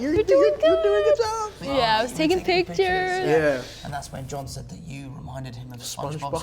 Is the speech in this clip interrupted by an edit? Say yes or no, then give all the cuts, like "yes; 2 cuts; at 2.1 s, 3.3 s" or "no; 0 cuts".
yes; 2 cuts; at 1.5 s, 3.8 s